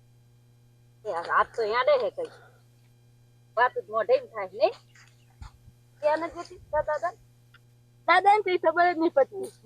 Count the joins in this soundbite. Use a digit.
0